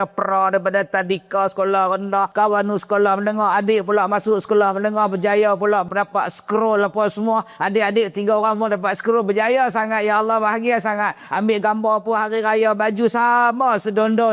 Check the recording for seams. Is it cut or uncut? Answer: cut